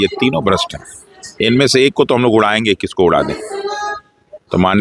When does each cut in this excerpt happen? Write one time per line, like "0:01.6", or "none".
none